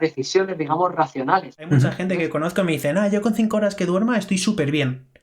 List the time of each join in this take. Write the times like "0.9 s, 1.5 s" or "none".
1.9 s